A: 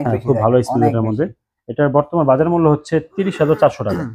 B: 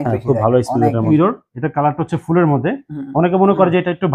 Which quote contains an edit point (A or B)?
B